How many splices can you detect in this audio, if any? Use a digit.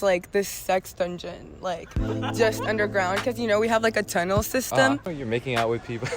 1